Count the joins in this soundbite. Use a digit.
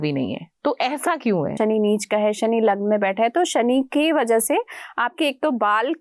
1